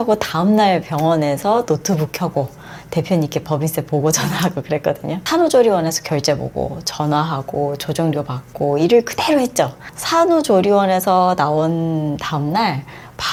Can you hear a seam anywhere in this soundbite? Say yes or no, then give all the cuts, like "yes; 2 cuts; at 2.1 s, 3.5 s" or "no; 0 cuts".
no; 0 cuts